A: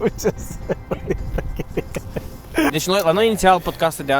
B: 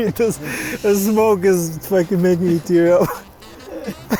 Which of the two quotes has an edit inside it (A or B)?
A